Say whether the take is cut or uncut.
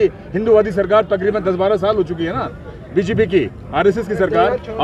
uncut